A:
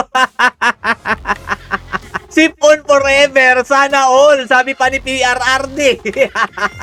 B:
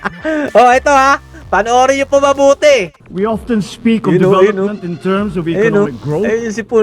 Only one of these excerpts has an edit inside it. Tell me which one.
B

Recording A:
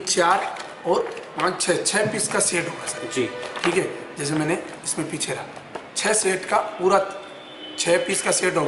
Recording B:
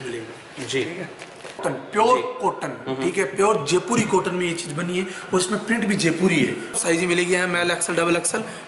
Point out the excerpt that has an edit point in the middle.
B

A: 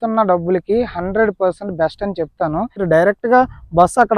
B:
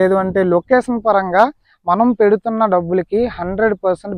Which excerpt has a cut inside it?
A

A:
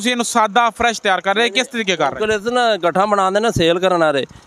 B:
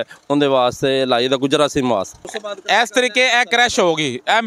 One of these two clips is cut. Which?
B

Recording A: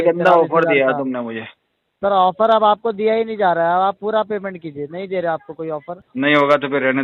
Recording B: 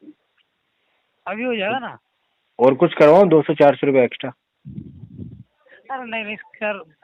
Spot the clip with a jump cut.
A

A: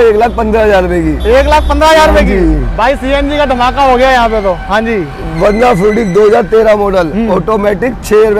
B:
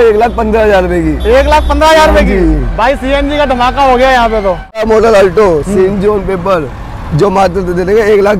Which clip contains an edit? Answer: B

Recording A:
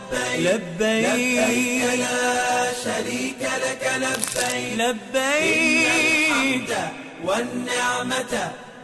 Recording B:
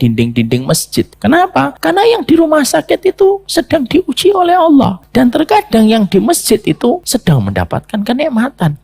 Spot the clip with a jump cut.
B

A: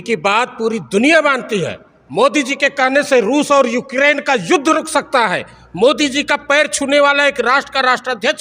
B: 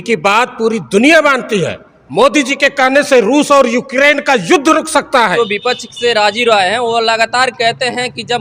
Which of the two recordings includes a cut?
B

